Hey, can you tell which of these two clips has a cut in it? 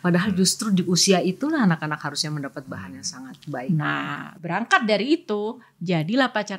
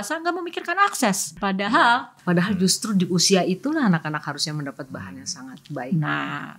second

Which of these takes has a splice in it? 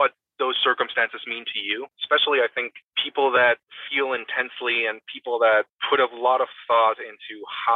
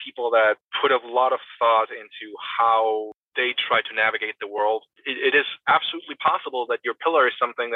first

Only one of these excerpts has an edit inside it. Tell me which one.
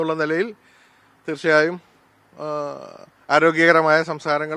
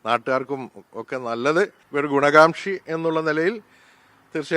second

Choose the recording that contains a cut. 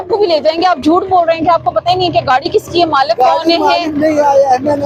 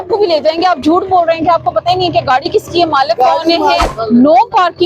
second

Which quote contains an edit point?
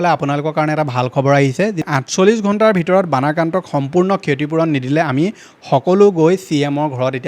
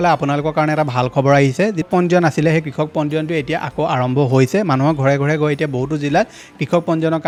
first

